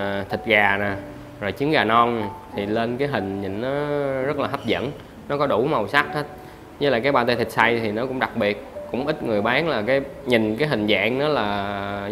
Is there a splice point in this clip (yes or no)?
no